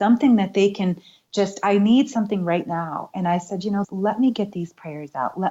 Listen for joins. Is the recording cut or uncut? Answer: cut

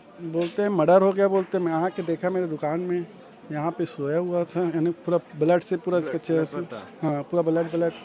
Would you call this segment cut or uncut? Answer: uncut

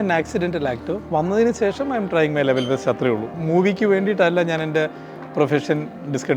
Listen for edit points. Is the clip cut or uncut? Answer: cut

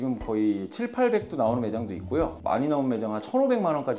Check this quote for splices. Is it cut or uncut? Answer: uncut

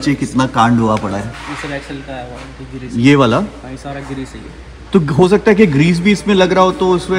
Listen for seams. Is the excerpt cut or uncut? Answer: uncut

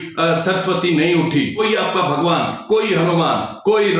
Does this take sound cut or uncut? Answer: cut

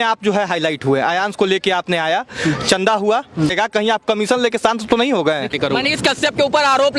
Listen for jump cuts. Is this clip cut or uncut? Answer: cut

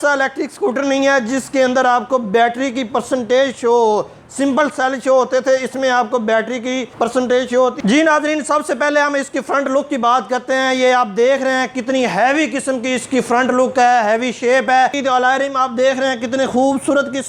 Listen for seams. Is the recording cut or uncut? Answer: cut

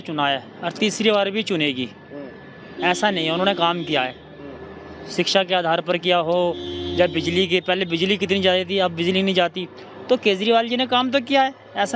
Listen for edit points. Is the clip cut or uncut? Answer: uncut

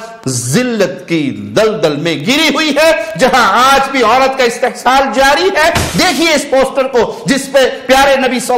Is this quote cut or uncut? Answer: cut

